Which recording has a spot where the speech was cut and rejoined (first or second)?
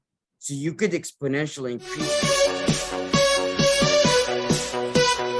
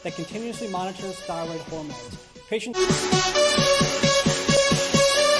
first